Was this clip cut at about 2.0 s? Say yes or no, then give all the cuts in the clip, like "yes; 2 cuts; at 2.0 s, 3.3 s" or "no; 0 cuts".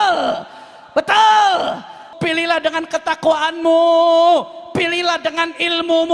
yes; 1 cut; at 2.0 s